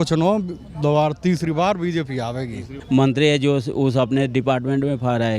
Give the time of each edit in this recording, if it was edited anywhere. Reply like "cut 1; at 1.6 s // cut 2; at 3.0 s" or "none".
cut 1; at 2.7 s